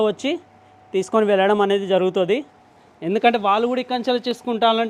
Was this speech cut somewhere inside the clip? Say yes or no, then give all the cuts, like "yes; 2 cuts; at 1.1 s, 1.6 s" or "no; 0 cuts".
no; 0 cuts